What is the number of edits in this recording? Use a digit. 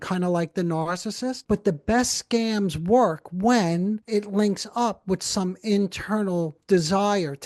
2